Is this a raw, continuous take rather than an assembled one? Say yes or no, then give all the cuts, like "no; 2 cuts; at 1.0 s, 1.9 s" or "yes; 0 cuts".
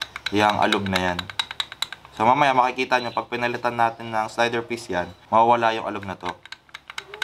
yes; 0 cuts